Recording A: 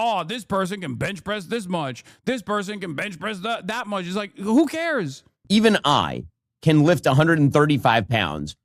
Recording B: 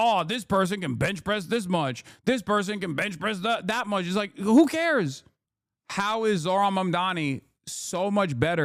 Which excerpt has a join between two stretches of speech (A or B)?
A